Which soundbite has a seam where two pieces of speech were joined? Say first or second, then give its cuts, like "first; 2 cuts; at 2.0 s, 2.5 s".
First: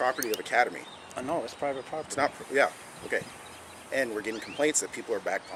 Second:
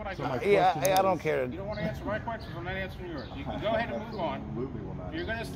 second; 1 cut; at 1.6 s